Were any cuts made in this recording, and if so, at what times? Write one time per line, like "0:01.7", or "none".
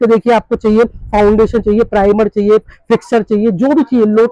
none